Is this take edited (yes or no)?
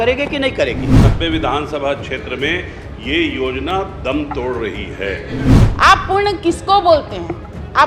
yes